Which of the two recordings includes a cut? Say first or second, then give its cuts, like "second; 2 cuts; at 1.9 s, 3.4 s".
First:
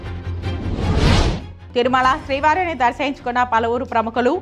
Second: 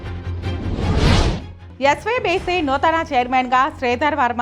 first; 1 cut; at 1.5 s